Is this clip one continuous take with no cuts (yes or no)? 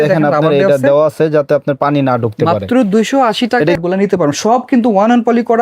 no